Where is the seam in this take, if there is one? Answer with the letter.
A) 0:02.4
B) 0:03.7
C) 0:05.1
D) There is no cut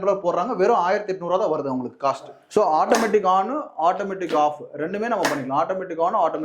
A